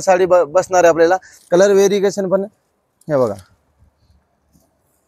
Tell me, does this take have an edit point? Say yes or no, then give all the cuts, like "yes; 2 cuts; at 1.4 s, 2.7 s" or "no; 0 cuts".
yes; 1 cut; at 1.3 s